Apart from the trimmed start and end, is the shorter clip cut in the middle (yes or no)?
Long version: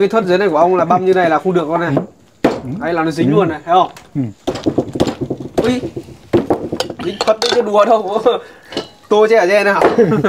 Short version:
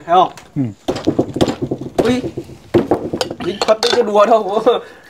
no